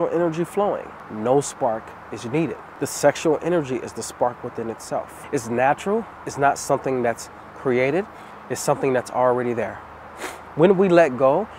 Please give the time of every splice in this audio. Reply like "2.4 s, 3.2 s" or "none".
1.0 s, 2.7 s, 5.2 s